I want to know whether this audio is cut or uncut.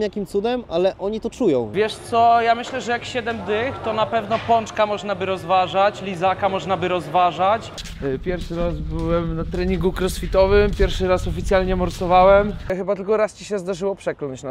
cut